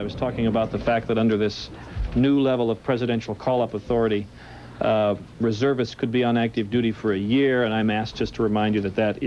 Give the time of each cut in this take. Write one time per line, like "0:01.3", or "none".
none